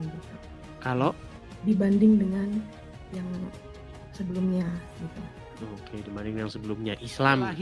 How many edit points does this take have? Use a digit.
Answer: 0